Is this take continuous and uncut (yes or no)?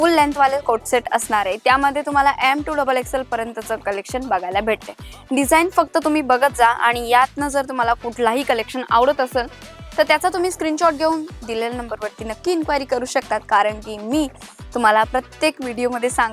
yes